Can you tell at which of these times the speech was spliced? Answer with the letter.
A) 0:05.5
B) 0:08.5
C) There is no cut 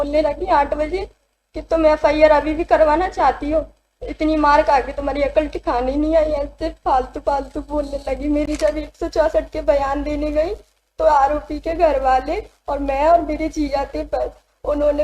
B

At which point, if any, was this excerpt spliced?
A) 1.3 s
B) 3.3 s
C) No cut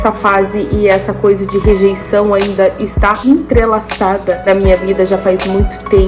C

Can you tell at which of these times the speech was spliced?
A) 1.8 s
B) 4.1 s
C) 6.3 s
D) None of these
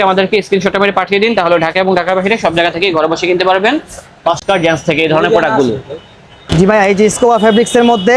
D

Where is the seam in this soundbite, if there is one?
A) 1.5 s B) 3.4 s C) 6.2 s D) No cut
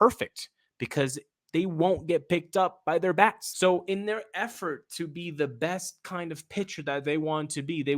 B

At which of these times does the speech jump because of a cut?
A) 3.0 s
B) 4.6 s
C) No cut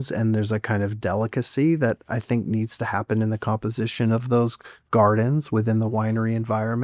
C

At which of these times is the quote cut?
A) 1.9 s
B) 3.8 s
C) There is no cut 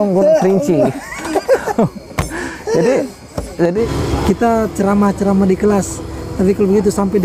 B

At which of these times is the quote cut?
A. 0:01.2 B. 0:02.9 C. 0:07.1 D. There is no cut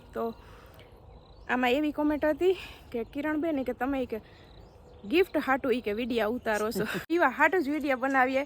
C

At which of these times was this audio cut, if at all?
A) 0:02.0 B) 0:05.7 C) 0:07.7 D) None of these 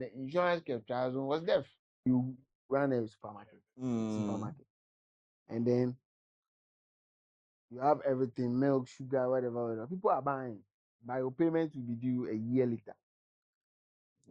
A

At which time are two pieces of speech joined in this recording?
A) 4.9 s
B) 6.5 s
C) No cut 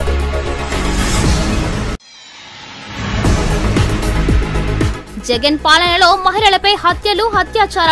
A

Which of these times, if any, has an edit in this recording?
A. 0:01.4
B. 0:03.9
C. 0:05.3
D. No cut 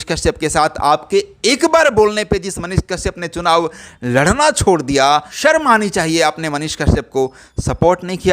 C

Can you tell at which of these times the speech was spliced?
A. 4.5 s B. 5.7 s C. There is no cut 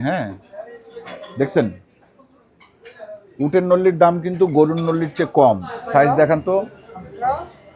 B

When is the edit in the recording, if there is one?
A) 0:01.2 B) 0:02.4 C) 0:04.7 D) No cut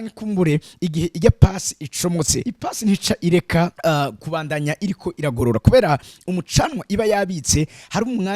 B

